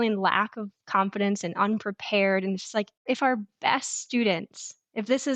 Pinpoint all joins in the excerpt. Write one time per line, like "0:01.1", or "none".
0:03.0